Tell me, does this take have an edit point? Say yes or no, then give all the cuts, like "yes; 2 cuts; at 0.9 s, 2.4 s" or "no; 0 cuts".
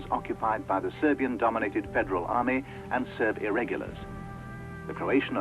yes; 1 cut; at 1.6 s